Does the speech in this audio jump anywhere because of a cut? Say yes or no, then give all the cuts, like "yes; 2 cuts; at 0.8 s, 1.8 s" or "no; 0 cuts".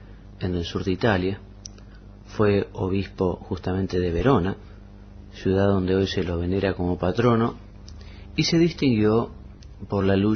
no; 0 cuts